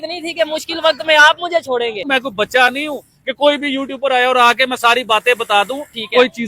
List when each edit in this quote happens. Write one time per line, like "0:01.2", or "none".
0:02.0